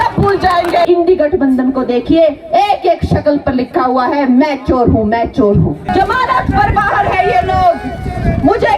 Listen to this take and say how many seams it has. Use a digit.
2